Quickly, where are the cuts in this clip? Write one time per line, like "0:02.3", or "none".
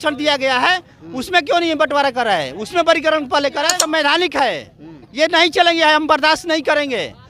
0:03.8